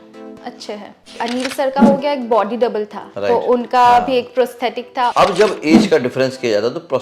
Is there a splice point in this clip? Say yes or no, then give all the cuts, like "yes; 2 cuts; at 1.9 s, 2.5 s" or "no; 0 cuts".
yes; 2 cuts; at 1.2 s, 5.1 s